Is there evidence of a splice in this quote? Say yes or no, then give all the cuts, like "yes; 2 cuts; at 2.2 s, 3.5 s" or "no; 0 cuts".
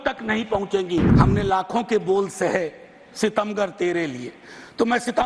yes; 1 cut; at 1.1 s